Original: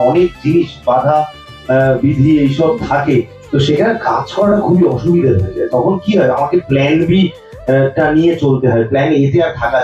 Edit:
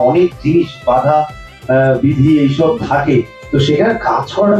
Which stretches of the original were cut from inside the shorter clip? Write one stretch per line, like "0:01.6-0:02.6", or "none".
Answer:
none